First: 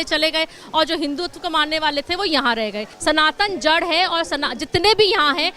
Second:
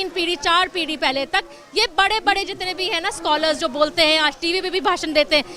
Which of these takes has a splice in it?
first; 1 cut; at 2.9 s

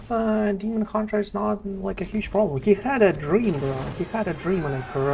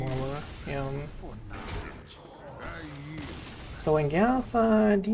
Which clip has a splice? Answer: second; 1 cut; at 1.8 s

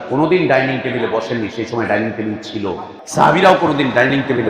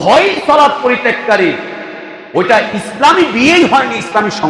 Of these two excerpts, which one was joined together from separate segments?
first; 1 cut; at 3.0 s

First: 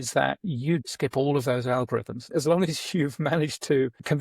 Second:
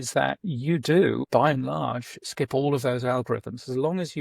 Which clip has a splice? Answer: first; 2 cuts; at 0.8 s, 2.2 s

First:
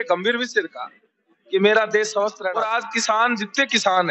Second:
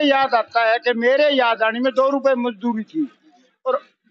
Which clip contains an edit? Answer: first; 1 cut; at 2.5 s

